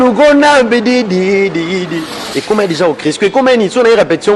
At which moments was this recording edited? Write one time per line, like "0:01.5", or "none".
0:02.2